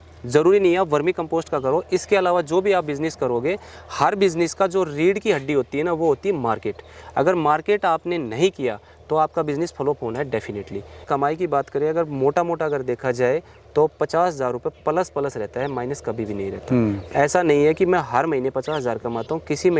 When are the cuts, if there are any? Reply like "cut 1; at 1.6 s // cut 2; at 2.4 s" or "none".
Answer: cut 1; at 11.1 s